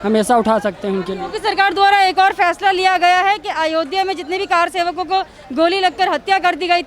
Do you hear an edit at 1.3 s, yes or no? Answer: no